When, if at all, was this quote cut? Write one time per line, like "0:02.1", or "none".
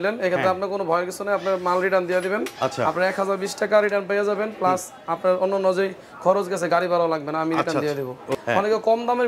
0:08.3